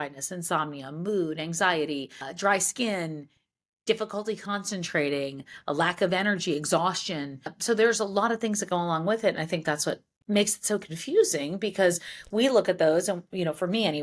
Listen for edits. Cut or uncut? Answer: cut